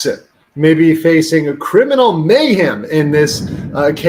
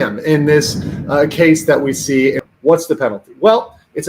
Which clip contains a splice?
second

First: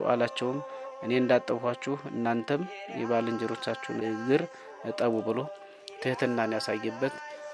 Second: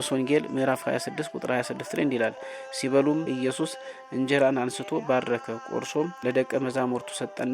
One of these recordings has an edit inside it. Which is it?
second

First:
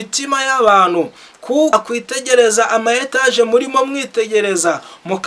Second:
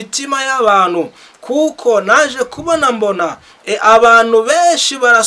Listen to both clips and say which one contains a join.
first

